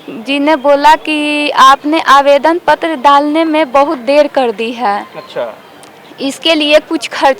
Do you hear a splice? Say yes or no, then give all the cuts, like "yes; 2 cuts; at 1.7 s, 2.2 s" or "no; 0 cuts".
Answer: no; 0 cuts